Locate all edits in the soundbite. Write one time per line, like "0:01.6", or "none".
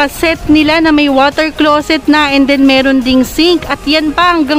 none